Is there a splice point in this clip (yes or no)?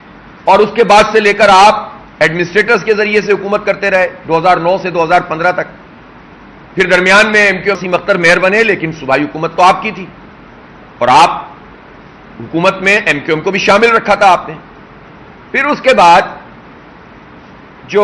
yes